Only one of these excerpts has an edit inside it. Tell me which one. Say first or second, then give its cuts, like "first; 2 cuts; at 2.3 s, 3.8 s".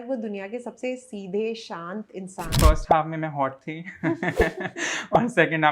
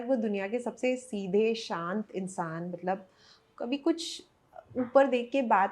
first; 1 cut; at 2.4 s